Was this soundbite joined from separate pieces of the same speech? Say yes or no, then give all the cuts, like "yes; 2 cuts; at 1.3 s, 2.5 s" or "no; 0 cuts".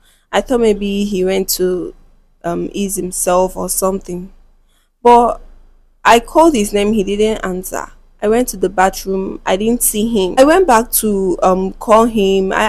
yes; 1 cut; at 10.4 s